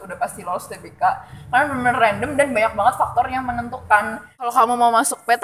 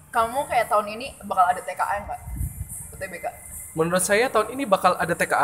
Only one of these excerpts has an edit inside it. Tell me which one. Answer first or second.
first